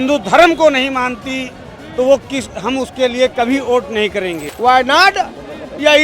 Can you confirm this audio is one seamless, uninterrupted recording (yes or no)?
no